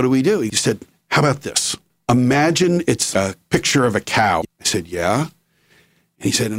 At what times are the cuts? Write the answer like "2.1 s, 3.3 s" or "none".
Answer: 3.1 s, 4.6 s